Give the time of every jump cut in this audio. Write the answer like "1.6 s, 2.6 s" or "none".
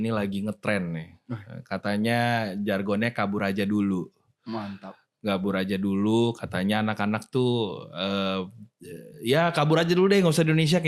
none